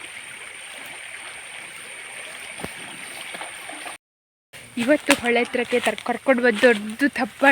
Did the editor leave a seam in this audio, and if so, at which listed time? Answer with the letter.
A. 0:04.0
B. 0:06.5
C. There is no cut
A